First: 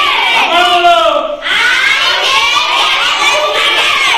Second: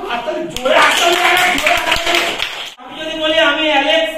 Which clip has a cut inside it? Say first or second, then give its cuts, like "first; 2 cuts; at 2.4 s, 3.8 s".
second; 1 cut; at 2.9 s